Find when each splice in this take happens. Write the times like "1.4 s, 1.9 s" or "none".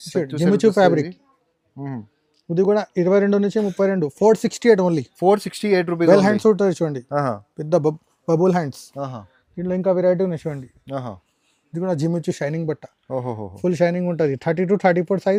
none